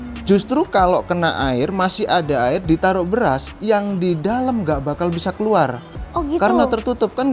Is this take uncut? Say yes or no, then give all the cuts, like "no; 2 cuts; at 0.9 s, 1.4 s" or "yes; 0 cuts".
yes; 0 cuts